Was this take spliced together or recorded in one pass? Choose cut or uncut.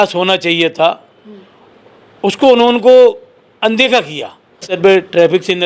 cut